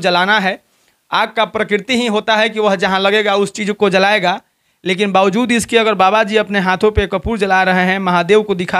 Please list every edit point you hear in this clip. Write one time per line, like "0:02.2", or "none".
none